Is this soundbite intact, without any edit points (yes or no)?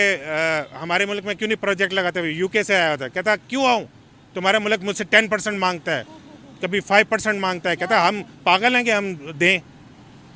yes